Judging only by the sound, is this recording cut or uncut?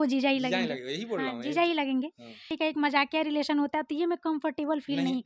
cut